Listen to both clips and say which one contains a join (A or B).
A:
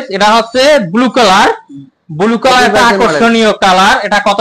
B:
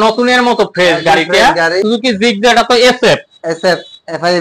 B